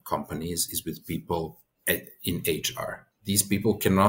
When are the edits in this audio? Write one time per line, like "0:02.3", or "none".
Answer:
0:01.7
0:03.1